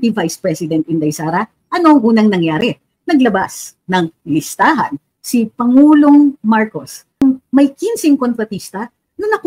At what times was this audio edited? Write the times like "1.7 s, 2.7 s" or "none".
7.2 s